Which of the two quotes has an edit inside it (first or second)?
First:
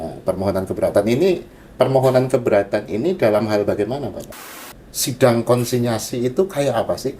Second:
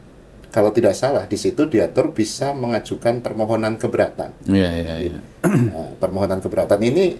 first